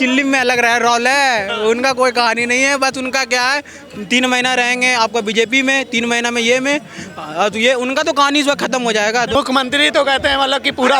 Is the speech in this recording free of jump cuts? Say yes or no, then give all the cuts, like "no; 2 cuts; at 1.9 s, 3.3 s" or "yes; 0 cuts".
no; 1 cut; at 9.4 s